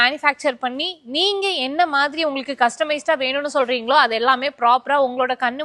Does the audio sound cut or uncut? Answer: uncut